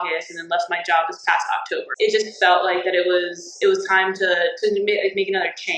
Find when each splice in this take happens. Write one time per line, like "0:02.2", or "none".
0:01.8